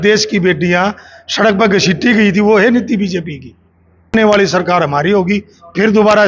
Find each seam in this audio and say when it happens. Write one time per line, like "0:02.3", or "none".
0:04.1